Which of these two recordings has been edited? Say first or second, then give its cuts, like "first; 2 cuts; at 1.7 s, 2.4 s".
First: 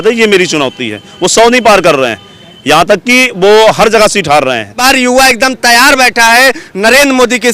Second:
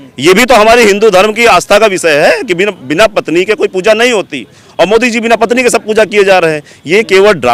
first; 1 cut; at 4.8 s